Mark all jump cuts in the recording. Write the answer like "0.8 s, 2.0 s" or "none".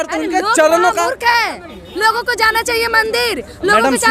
none

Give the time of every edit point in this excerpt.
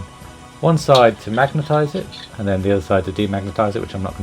2.4 s

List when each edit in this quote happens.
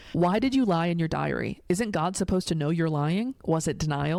none

